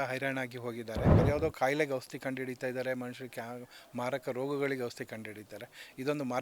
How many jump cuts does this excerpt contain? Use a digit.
1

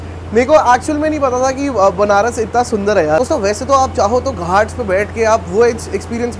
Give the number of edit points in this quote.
1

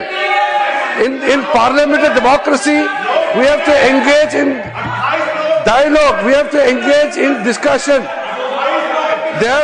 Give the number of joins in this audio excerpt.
0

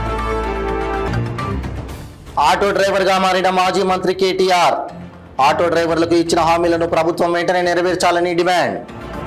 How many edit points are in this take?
1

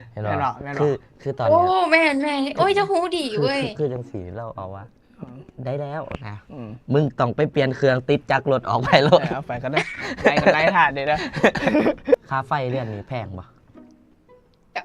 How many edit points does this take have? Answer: 1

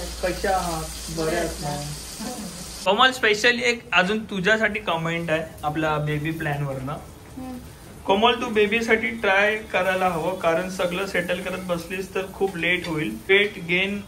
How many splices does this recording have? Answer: 2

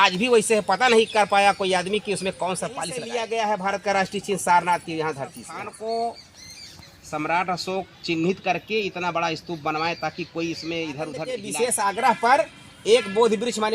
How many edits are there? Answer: 3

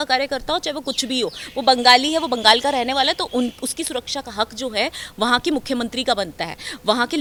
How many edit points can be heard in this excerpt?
0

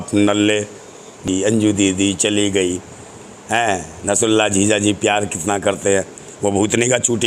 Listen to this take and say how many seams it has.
1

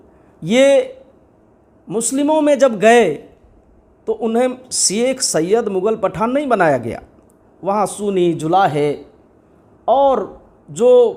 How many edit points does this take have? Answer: 0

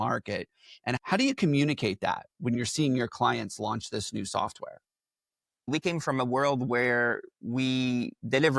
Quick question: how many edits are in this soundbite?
3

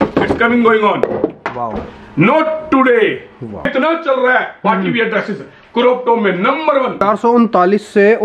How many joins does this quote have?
3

